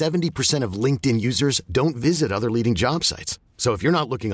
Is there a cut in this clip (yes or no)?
no